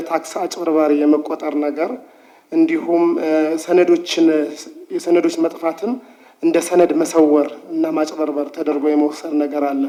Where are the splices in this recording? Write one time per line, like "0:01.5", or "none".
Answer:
none

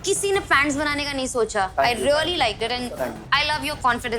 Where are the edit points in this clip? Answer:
0:01.7

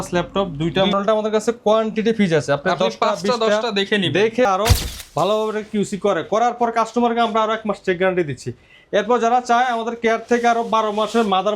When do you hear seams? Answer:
0:00.9
0:04.5

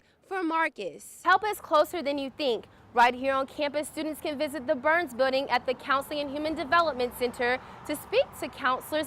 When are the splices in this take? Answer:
0:01.2

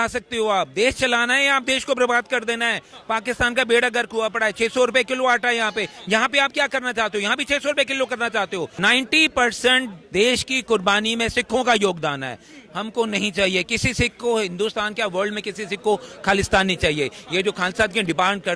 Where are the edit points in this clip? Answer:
0:08.7

